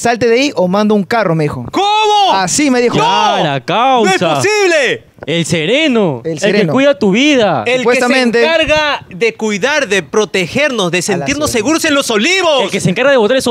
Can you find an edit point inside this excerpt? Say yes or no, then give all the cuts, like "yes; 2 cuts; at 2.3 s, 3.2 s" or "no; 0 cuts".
no; 0 cuts